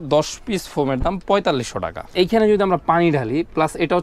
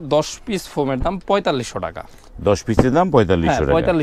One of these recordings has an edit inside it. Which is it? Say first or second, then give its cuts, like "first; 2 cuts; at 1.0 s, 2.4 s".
first; 1 cut; at 2.0 s